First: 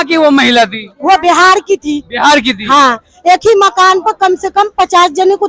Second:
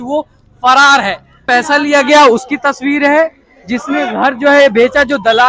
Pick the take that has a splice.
second; 1 cut; at 1.4 s

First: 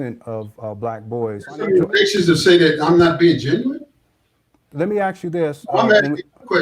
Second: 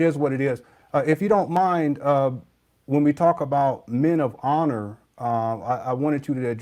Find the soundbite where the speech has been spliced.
first; 1 cut; at 1.6 s

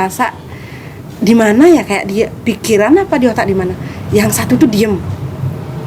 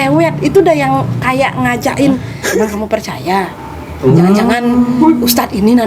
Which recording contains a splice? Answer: second; 1 cut; at 2.4 s

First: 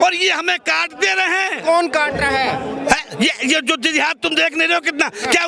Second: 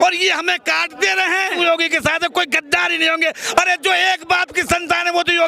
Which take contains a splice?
second; 1 cut; at 1.5 s

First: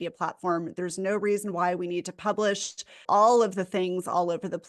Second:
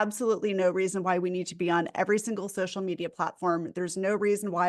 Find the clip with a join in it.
first; 1 cut; at 3.0 s

